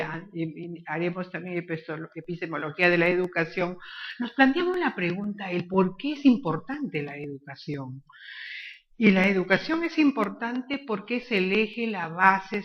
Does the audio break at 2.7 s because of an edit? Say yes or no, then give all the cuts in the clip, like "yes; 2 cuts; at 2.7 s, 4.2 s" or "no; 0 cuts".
no; 1 cut; at 5.1 s